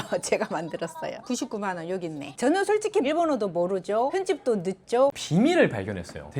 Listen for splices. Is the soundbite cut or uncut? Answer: cut